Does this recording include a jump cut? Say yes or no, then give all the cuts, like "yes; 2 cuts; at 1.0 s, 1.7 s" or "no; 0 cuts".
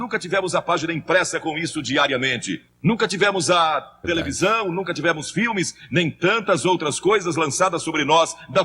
yes; 1 cut; at 2.7 s